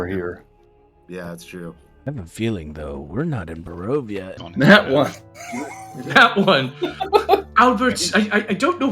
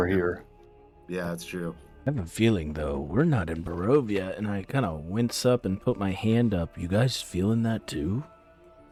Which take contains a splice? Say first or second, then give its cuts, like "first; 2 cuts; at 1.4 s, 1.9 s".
first; 1 cut; at 4.4 s